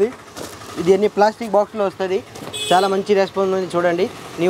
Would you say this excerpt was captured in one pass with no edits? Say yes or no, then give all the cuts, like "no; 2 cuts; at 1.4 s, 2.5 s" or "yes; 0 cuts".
yes; 0 cuts